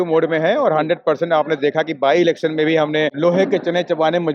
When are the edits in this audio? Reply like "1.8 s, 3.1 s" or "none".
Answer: 3.1 s